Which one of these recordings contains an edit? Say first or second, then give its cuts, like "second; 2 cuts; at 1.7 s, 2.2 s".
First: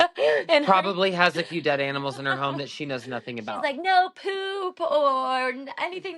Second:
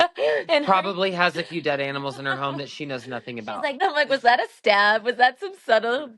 second; 1 cut; at 3.8 s